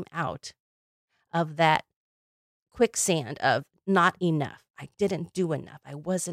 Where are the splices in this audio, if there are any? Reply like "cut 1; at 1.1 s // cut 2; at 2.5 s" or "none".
none